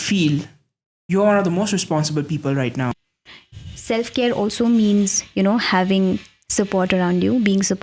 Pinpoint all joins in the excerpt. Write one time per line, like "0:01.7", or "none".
0:03.0